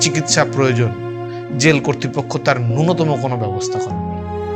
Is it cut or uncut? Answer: cut